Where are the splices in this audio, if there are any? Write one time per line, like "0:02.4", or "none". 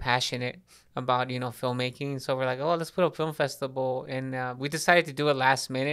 none